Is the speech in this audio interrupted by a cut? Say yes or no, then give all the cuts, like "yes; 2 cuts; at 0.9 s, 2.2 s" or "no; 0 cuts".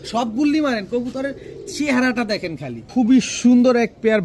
yes; 1 cut; at 2.9 s